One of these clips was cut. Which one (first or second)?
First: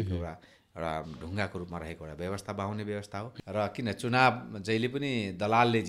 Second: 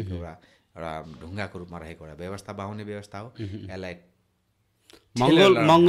first